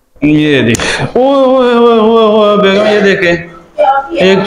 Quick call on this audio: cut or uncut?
uncut